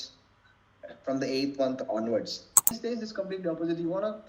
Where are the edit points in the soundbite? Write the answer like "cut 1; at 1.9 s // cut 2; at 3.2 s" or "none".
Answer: cut 1; at 2.7 s